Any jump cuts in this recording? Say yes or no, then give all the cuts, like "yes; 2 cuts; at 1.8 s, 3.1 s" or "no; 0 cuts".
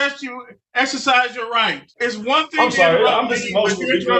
yes; 1 cut; at 1.8 s